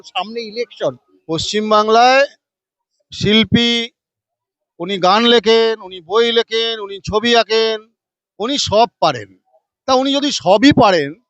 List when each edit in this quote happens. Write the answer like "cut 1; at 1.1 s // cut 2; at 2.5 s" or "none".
cut 1; at 1.1 s